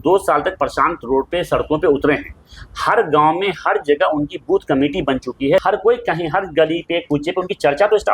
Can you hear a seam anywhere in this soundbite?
yes; 1 cut; at 5.6 s

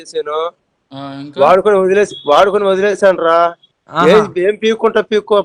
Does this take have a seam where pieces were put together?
no; 0 cuts

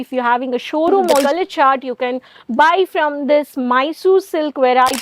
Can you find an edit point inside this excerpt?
yes; 1 cut; at 1.2 s

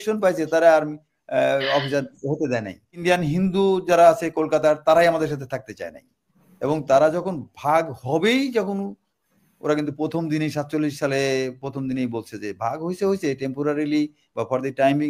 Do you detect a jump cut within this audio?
yes; 1 cut; at 3.0 s

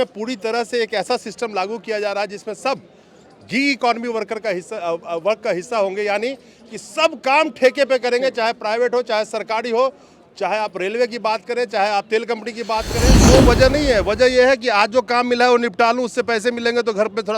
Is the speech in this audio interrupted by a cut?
yes; 1 cut; at 13.3 s

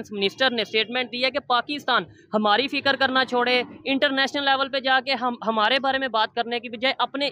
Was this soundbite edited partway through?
no; 0 cuts

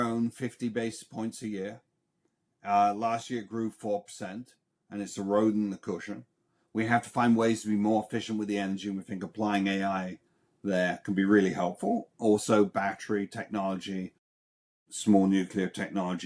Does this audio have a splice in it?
no; 0 cuts

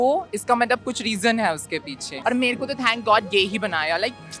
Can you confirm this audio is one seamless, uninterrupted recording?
no; 1 cut; at 2.1 s

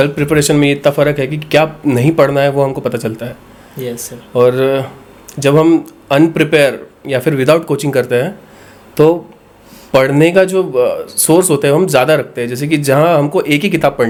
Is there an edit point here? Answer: no; 0 cuts

